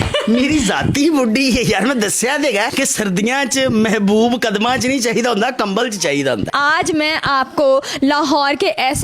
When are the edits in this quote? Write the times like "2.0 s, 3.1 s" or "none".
6.5 s